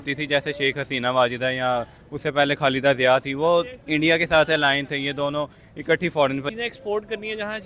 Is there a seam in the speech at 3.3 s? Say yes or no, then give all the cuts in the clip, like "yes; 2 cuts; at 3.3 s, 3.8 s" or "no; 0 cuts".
no; 1 cut; at 6.5 s